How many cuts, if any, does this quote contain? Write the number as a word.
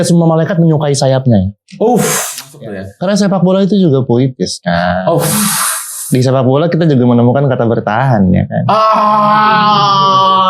one